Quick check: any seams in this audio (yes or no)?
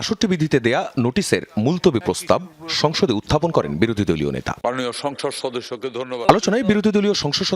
yes